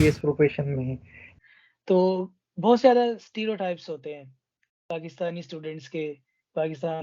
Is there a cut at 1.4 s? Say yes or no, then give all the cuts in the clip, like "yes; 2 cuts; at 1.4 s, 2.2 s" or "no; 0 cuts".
yes; 1 cut; at 1.4 s